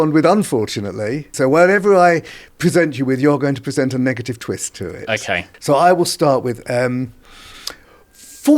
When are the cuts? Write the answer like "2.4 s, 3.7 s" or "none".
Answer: 1.3 s, 5.5 s